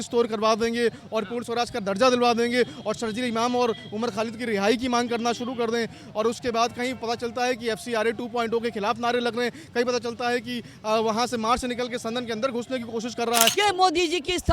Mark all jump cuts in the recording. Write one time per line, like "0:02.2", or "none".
0:13.6

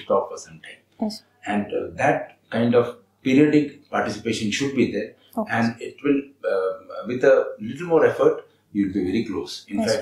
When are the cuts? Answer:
none

